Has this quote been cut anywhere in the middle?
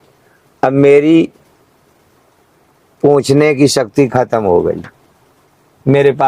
no; 0 cuts

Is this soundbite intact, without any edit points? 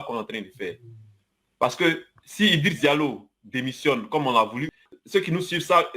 no; 1 cut; at 4.7 s

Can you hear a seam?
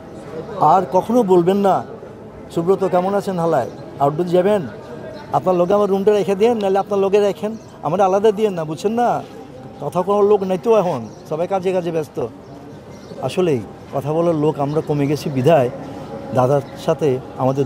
no; 0 cuts

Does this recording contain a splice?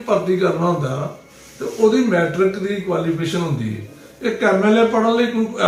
no; 0 cuts

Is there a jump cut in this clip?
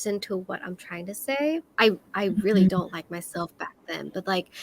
yes; 1 cut; at 1.7 s

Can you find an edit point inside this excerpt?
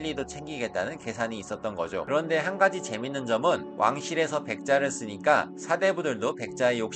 yes; 1 cut; at 2.0 s

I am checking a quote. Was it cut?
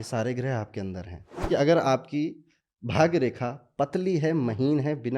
yes; 1 cut; at 1.5 s

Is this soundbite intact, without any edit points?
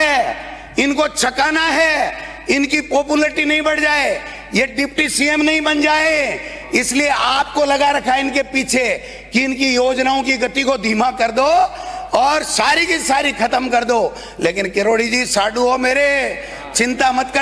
yes; 0 cuts

